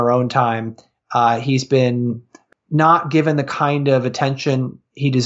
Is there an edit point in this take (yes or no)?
yes